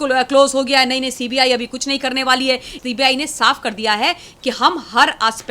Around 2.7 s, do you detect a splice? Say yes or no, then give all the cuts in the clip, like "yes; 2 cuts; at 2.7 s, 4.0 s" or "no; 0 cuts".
yes; 1 cut; at 2.7 s